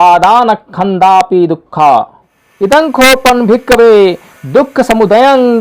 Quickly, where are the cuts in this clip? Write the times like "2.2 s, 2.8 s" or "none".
2.4 s